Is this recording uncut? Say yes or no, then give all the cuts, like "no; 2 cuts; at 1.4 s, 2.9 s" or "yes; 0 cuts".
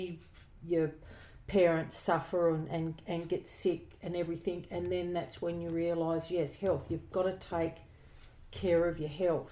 yes; 0 cuts